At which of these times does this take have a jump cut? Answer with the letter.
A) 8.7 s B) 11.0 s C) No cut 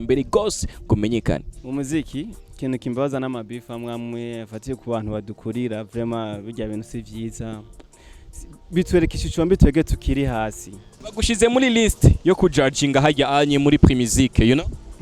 B